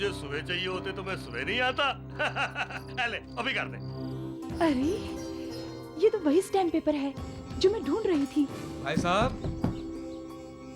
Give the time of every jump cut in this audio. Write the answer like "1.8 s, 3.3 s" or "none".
4.2 s, 8.7 s